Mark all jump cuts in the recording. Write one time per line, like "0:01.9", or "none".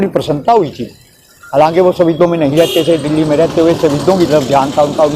none